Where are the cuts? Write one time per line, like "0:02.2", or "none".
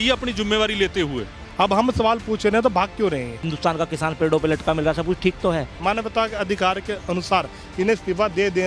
0:01.4
0:03.5
0:05.7